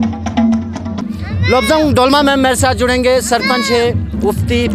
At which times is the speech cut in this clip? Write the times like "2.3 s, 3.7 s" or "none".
1.0 s

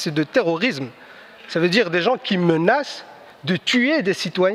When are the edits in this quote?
none

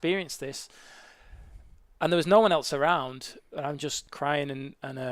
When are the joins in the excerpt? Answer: 4.0 s

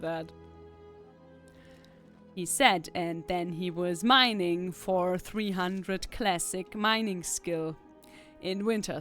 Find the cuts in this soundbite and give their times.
none

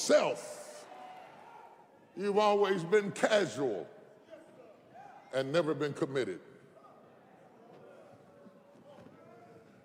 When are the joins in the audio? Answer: none

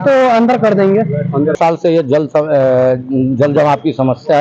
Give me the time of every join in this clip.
1.6 s

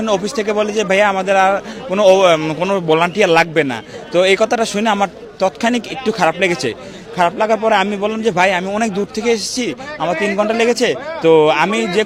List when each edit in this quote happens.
none

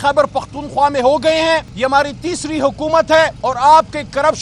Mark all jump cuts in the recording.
1.7 s, 3.4 s

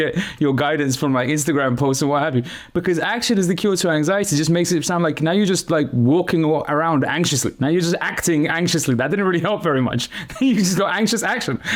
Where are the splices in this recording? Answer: none

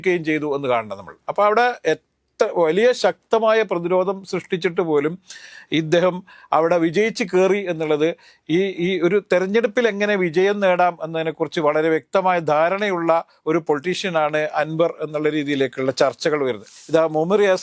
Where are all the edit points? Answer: 16.7 s

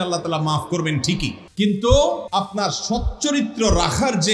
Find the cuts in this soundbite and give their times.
1.4 s, 2.2 s

